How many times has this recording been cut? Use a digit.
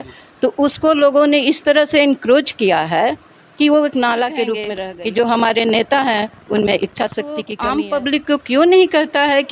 2